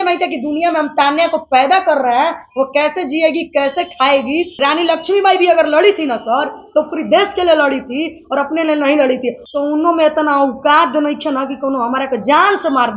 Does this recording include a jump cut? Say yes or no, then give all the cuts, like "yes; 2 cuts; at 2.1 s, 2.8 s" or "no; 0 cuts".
yes; 2 cuts; at 4.5 s, 9.4 s